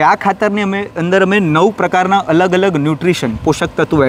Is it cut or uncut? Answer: uncut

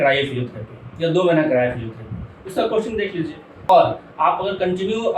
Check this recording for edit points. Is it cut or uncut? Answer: cut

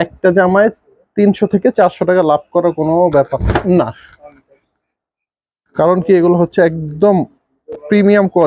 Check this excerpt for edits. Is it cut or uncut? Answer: uncut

